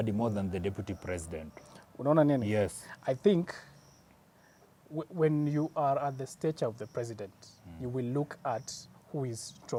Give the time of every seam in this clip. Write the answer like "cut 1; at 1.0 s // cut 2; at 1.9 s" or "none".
none